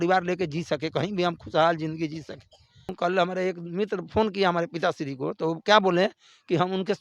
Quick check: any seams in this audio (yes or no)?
yes